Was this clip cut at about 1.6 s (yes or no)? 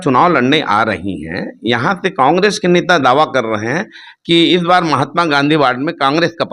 no